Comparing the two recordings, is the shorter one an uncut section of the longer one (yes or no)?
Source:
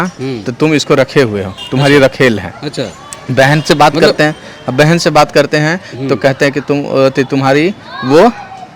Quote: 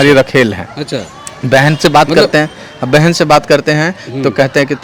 yes